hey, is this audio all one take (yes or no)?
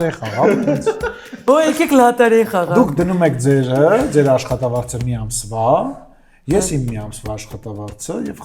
yes